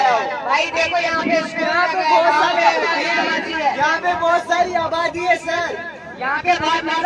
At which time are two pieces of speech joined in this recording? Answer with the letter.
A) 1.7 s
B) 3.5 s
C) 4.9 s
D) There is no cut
D